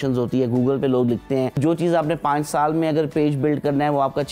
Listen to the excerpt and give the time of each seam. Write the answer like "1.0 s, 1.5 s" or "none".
1.6 s

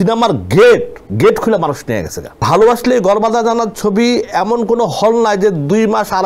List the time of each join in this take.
1.0 s, 2.4 s

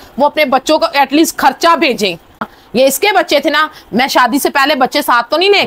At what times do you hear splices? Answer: 2.3 s

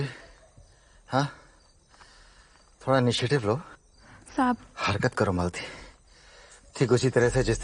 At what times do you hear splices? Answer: none

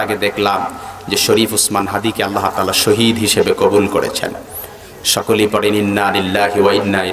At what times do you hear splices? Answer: none

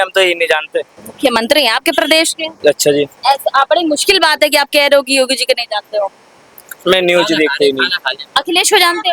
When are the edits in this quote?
none

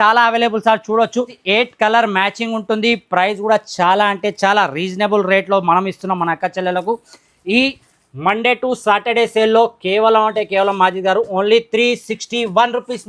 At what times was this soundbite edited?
1.4 s

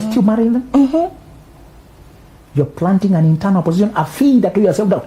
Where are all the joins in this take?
none

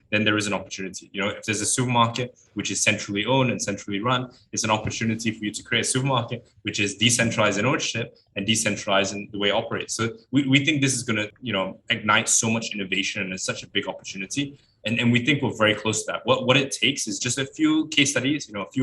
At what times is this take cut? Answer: 11.4 s, 14.7 s

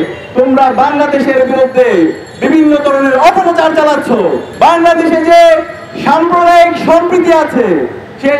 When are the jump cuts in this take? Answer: 4.4 s

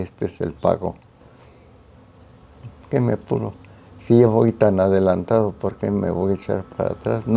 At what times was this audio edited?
none

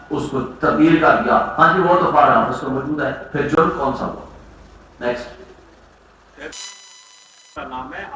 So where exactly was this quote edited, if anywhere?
none

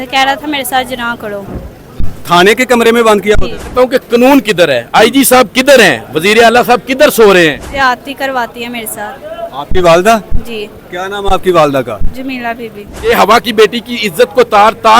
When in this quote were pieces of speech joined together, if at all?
3.7 s, 7.7 s, 12.9 s

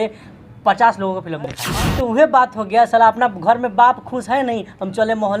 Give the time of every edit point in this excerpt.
1.6 s

